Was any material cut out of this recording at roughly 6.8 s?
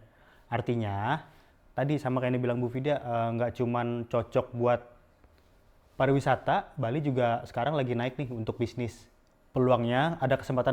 no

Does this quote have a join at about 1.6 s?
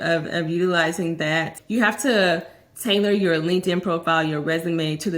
yes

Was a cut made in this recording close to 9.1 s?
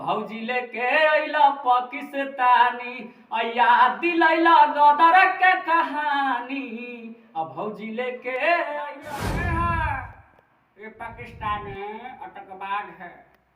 yes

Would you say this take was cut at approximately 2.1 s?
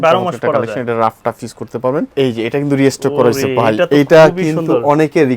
yes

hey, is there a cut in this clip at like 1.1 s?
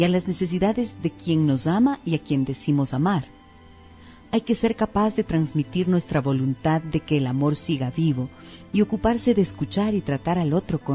no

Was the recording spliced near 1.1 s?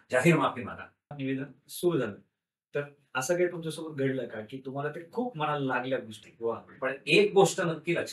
yes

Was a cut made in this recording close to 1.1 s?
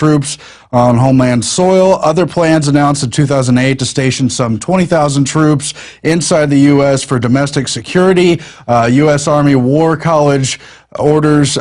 yes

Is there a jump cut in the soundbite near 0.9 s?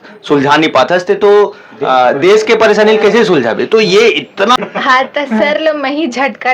no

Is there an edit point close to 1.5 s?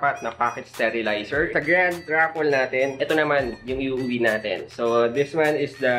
yes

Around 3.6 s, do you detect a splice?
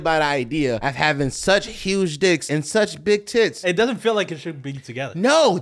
yes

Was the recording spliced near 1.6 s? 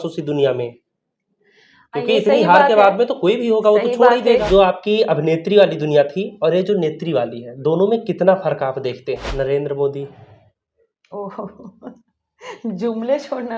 no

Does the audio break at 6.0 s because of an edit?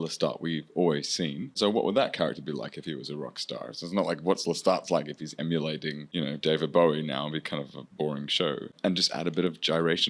yes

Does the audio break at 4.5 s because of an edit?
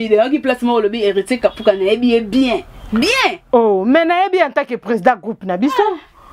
no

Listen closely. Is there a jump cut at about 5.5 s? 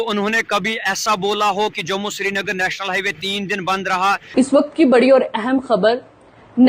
no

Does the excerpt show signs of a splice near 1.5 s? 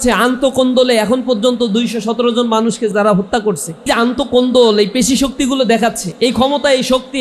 no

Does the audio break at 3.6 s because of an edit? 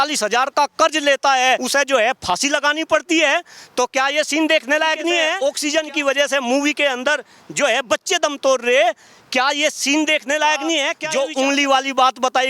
no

